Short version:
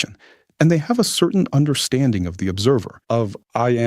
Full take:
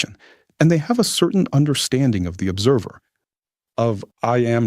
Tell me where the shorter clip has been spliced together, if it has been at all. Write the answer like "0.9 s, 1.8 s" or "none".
2.9 s